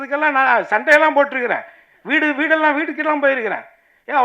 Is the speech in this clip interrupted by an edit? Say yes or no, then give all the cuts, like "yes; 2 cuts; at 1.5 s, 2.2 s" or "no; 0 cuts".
no; 0 cuts